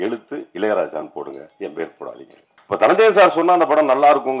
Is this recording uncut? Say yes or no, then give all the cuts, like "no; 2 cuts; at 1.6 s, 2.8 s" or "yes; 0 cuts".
no; 1 cut; at 2.5 s